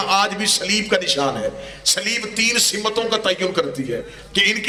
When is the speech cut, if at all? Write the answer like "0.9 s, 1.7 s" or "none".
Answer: none